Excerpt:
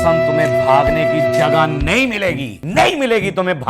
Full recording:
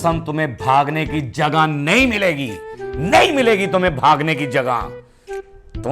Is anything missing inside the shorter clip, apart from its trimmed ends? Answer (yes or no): yes